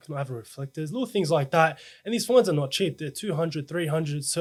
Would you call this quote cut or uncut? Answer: uncut